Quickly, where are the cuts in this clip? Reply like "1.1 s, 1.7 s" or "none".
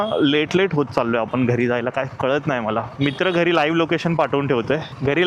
3.1 s

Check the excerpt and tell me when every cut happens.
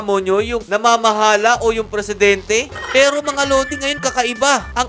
2.8 s

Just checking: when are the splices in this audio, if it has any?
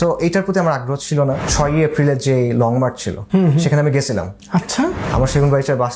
1.5 s, 3.1 s, 4.4 s

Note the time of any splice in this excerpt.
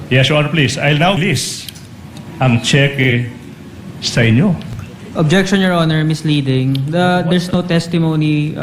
1.2 s

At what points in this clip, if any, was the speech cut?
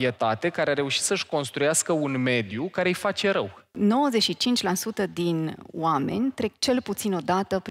3.7 s

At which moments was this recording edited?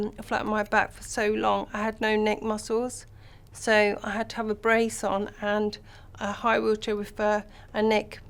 none

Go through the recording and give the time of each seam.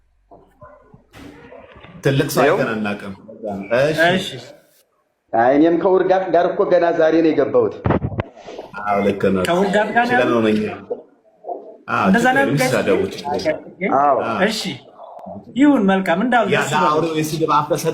none

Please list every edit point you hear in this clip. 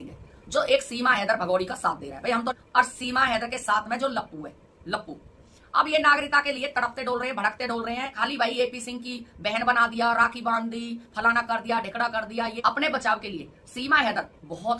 2.6 s, 5.5 s, 8.1 s, 12.6 s

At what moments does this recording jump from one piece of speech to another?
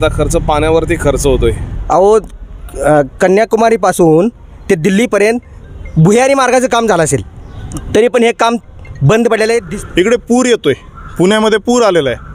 1.7 s, 9.7 s

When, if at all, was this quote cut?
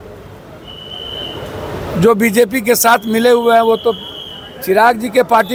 none

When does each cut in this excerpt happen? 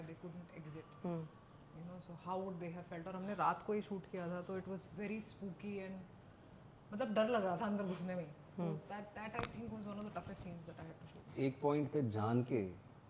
none

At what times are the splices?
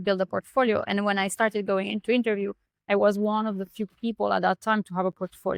none

